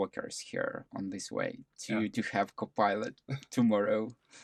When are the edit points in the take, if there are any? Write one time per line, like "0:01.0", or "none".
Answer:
none